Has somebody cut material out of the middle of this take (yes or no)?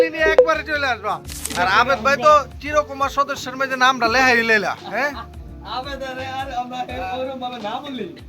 yes